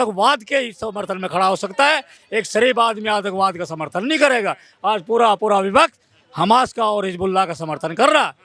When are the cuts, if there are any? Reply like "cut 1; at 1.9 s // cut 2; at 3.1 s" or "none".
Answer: none

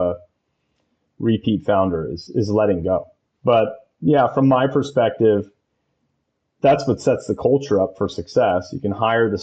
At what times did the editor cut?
cut 1; at 3.2 s

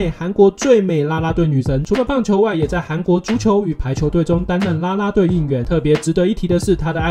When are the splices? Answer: none

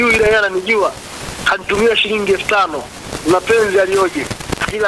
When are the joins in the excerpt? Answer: none

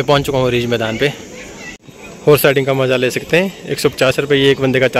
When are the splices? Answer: cut 1; at 1.8 s

